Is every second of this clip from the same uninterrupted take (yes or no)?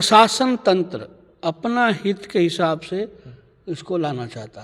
yes